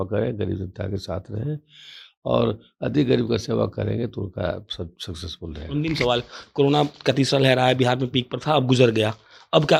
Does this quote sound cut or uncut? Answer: uncut